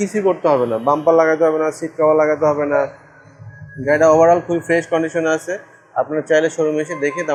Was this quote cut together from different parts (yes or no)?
no